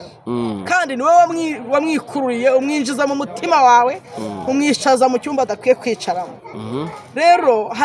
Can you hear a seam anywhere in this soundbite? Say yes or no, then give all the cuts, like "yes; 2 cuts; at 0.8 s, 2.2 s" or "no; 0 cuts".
no; 0 cuts